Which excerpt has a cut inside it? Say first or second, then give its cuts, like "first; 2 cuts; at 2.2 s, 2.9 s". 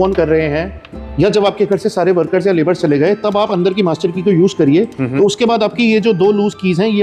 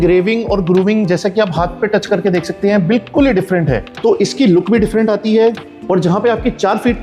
second; 1 cut; at 3.9 s